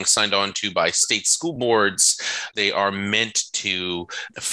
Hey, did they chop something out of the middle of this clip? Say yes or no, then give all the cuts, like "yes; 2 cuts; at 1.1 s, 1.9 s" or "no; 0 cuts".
yes; 1 cut; at 2.5 s